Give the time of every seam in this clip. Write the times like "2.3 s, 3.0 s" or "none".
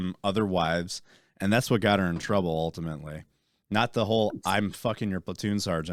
none

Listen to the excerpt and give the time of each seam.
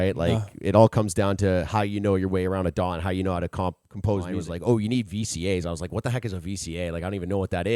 4.3 s

